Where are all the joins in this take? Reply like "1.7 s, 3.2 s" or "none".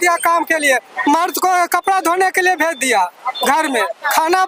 none